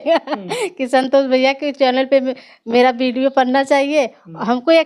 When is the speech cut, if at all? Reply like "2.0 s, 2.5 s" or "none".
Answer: none